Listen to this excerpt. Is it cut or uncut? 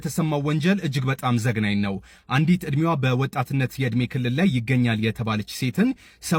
uncut